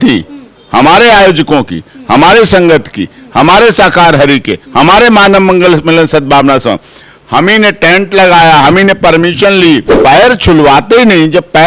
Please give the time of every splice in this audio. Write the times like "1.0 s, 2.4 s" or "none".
9.9 s